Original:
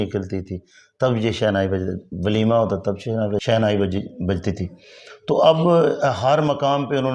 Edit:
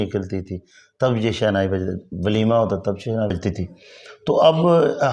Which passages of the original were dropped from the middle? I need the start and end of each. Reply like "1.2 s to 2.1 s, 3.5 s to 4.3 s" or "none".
3.3 s to 4.3 s